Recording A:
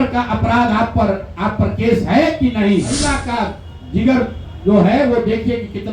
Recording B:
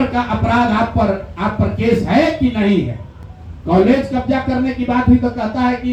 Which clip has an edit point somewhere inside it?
A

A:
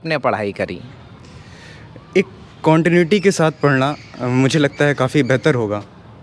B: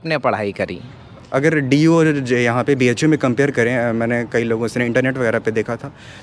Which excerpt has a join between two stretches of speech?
B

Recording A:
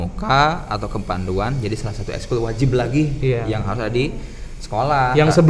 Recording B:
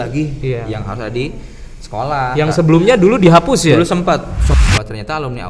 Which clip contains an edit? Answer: B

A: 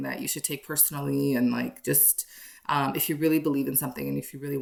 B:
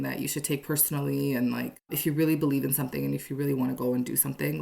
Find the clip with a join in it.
B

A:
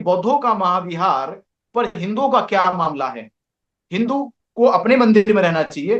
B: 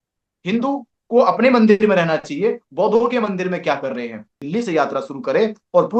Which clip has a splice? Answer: B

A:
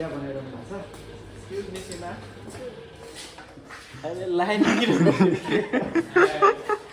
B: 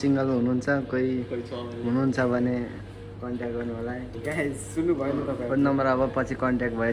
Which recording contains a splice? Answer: B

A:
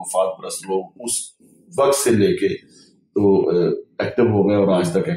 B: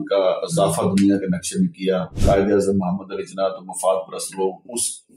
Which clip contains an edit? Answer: B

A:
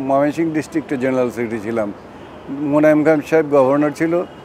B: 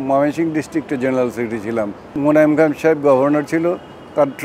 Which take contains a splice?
B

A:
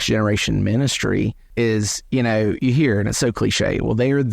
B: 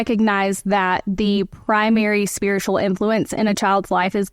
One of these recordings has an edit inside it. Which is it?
A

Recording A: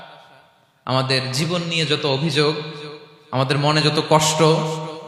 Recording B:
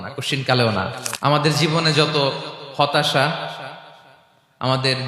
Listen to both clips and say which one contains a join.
B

